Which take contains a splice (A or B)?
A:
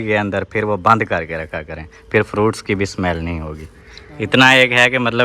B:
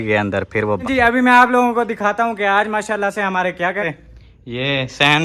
B